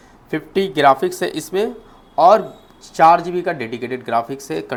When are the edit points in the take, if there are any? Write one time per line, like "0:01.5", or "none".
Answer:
none